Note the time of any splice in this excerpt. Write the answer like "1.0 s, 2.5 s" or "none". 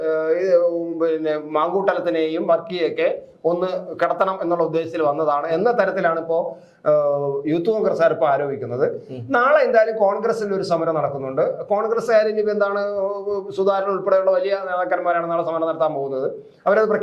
none